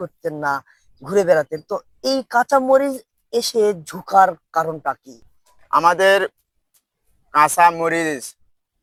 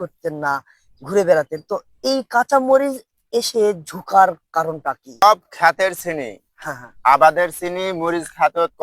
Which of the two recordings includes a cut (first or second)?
second